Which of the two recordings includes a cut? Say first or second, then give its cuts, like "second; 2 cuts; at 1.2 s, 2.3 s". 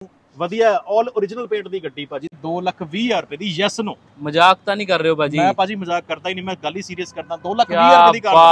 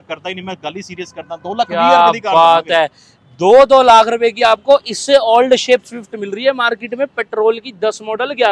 first; 1 cut; at 2.3 s